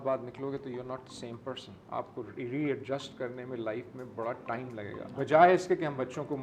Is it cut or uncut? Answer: cut